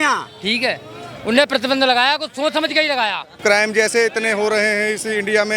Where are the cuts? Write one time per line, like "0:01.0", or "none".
0:03.2